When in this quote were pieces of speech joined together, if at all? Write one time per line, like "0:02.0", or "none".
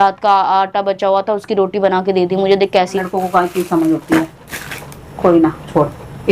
0:03.0